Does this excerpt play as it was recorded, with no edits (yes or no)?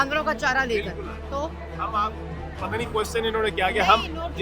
yes